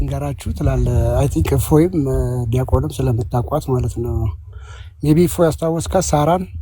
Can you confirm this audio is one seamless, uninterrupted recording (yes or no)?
yes